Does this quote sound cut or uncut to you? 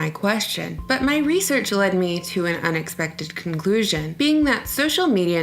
cut